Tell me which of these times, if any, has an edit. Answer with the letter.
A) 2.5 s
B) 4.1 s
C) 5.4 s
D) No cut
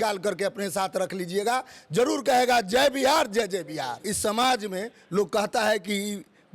B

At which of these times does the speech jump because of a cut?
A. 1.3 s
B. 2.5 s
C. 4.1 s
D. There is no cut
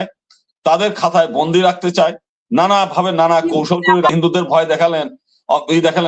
C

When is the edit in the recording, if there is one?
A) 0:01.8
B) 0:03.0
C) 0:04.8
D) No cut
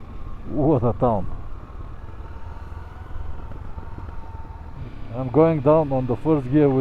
C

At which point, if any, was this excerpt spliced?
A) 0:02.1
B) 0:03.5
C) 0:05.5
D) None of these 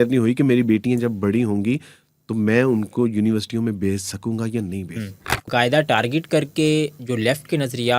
C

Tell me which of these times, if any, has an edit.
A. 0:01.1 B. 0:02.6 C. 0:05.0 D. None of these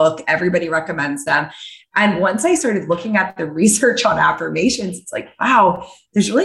B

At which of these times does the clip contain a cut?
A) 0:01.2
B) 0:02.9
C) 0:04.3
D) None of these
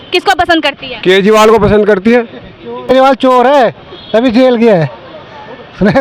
B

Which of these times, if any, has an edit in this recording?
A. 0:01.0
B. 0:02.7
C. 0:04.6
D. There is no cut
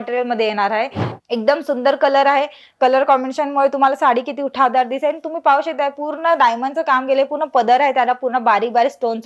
A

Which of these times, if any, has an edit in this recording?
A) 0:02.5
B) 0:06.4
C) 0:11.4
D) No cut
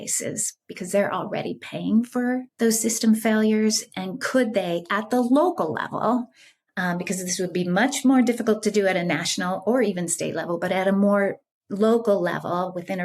A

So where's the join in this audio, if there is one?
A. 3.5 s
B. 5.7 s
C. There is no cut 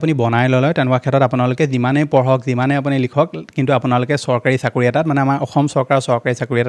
C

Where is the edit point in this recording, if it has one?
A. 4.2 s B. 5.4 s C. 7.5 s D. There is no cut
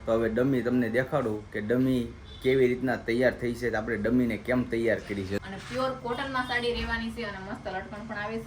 B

